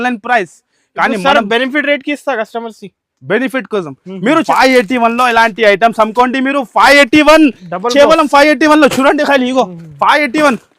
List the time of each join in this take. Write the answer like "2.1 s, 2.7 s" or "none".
4.4 s

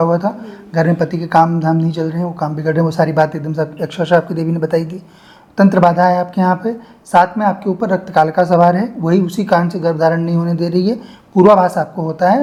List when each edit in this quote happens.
none

